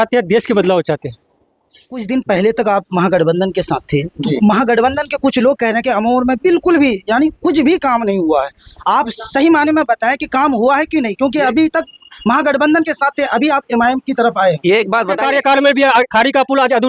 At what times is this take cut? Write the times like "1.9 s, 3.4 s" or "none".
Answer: 2.0 s, 15.2 s

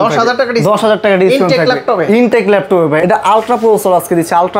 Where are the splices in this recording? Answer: 3.0 s

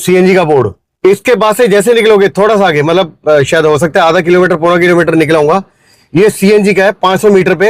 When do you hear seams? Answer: 0.9 s

